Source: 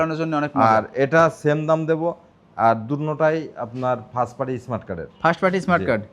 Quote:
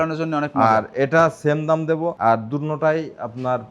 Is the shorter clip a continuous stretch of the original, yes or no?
no